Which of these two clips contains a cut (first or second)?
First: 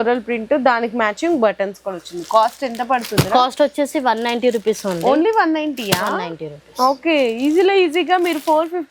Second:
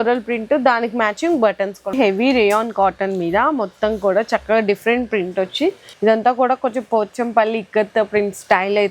second